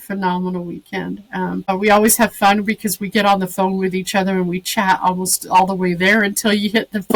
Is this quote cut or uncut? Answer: cut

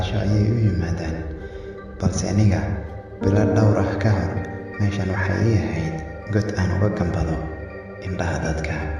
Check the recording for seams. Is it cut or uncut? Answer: uncut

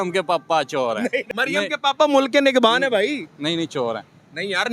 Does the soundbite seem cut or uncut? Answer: cut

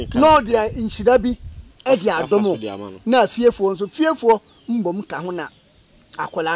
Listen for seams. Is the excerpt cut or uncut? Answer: uncut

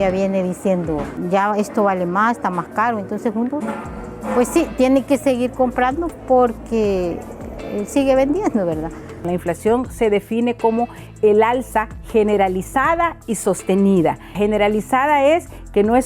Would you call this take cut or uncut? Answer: cut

